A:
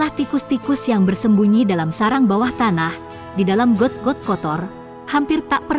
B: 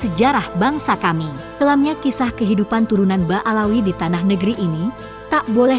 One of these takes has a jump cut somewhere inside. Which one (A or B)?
B